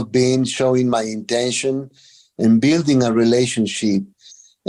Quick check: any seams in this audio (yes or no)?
no